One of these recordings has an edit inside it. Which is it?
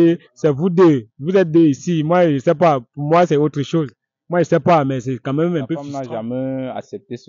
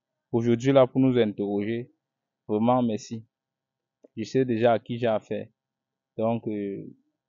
first; 1 cut; at 5.9 s

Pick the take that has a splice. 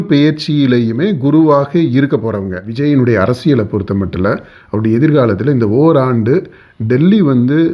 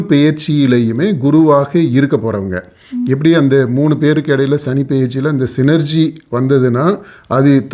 first; 1 cut; at 2.7 s

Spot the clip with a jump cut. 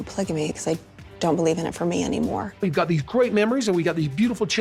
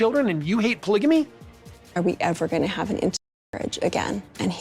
second; 1 cut; at 1.4 s

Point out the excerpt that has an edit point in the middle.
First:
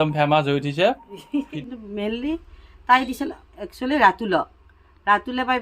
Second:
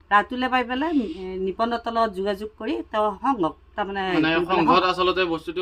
first; 2 cuts; at 1.5 s, 3.2 s

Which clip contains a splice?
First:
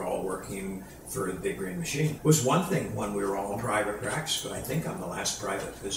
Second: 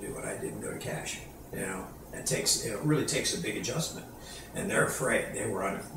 first; 1 cut; at 2.2 s

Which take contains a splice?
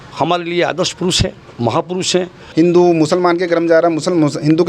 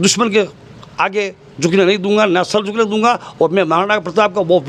first; 1 cut; at 2.4 s

